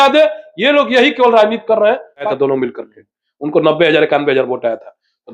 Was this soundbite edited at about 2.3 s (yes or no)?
yes